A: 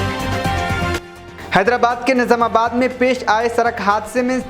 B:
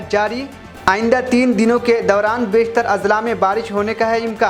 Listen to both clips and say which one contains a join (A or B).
A